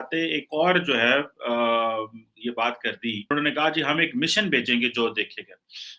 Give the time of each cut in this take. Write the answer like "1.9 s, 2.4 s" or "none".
3.3 s